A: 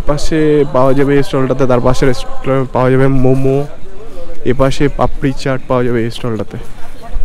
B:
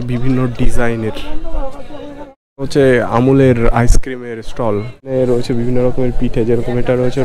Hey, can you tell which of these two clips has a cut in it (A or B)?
B